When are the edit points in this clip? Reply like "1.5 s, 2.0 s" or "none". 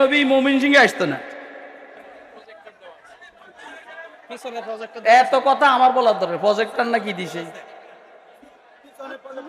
2.4 s